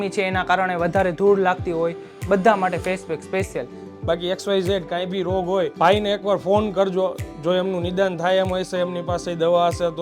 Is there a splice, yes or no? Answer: yes